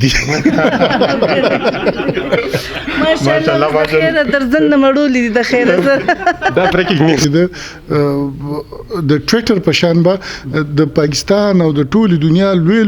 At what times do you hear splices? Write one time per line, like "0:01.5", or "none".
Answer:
0:07.2